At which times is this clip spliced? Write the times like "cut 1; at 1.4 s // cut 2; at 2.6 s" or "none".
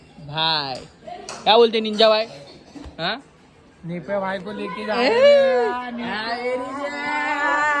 none

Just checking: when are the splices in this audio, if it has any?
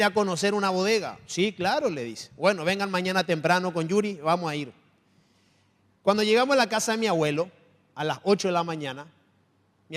none

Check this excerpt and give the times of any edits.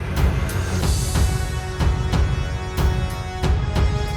none

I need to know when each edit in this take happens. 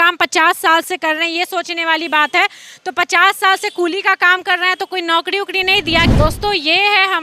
cut 1; at 6.1 s

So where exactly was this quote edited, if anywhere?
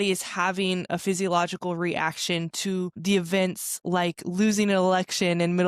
none

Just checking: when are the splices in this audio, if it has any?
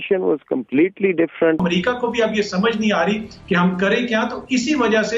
cut 1; at 1.6 s

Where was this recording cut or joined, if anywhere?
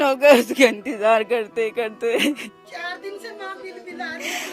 cut 1; at 2.5 s

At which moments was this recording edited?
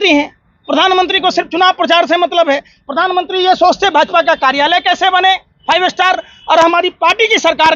none

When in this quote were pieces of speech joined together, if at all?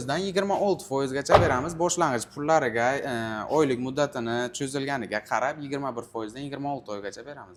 none

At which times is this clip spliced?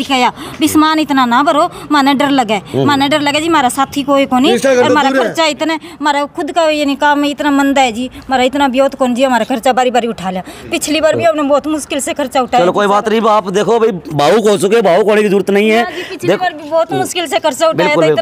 none

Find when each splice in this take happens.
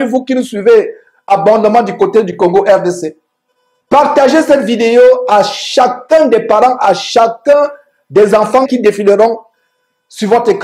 cut 1; at 8.7 s

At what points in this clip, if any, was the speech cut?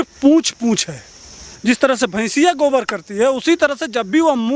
cut 1; at 1.5 s

